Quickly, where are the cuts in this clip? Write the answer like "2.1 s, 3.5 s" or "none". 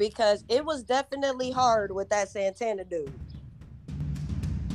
3.2 s